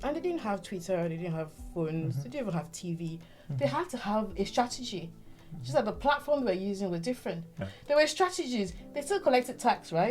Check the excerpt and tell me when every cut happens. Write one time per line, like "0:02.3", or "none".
0:07.7